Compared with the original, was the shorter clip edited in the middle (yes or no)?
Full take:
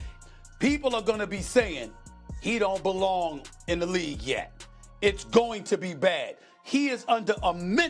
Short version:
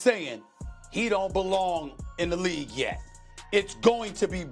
no